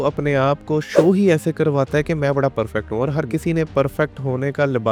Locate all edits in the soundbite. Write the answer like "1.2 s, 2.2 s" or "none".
none